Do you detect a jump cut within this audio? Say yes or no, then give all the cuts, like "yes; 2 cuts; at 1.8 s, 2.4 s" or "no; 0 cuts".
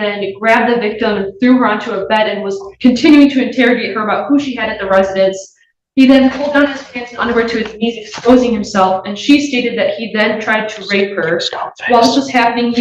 no; 0 cuts